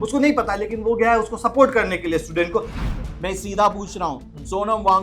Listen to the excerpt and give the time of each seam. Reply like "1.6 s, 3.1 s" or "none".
2.8 s